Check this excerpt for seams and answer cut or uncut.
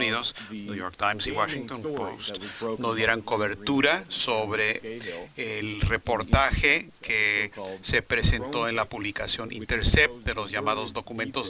uncut